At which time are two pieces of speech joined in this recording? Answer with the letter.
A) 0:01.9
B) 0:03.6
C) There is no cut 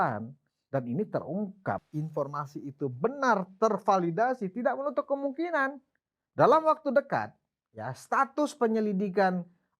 A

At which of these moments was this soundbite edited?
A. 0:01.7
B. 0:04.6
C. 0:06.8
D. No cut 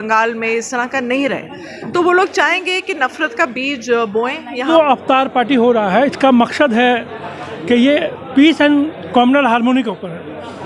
B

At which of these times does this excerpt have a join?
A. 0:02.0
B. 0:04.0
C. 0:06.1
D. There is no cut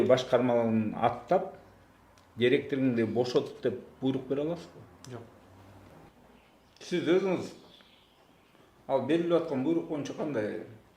C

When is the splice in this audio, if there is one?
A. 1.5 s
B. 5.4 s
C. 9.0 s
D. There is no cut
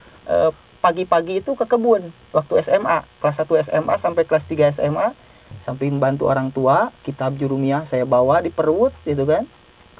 B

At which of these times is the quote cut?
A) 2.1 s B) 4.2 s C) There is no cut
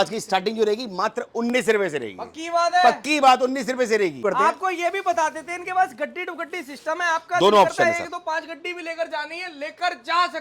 B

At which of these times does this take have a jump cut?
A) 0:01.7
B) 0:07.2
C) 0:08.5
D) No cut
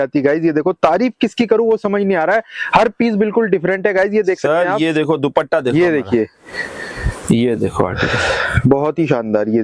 D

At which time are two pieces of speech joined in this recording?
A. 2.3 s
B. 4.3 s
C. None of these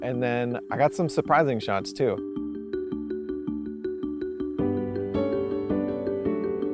C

